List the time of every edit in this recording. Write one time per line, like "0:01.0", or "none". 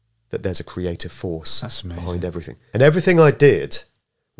0:02.7

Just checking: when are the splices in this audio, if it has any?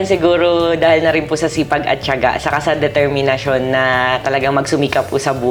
none

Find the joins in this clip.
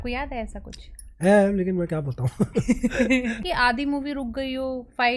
0:03.4

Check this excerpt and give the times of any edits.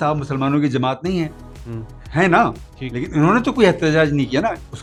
none

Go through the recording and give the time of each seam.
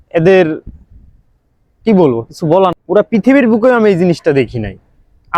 0:02.8

